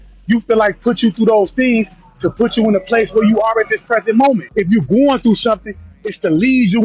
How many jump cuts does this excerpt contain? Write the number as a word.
one